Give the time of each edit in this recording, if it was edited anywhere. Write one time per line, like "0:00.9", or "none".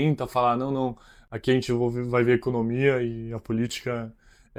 none